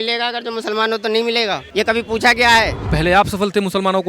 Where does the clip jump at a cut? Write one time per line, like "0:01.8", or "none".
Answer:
0:01.6
0:02.8